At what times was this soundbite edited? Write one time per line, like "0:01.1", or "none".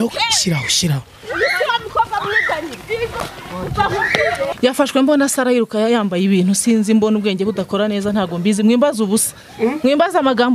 0:04.6